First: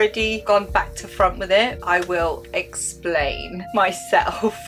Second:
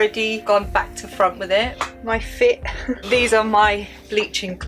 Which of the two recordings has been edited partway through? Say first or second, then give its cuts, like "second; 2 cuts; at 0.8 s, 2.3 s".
second; 1 cut; at 1.8 s